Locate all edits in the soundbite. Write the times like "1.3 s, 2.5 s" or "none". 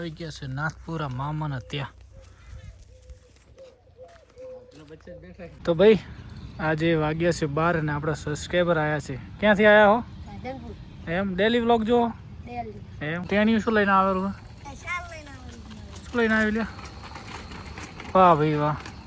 5.6 s, 13.2 s

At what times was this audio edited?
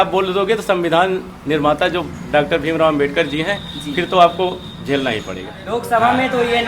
5.5 s

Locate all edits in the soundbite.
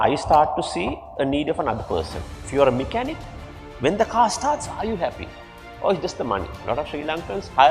2.4 s, 6.6 s

